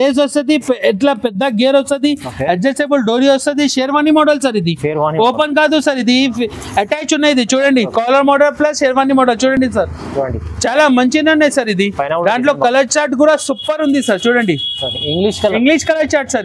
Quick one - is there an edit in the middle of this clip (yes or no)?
no